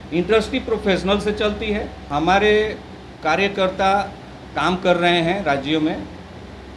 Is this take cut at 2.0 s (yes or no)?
yes